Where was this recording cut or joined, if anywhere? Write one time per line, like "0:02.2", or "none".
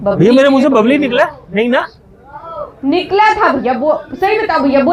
none